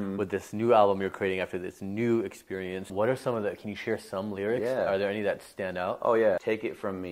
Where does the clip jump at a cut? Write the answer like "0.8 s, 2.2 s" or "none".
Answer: 2.9 s, 6.4 s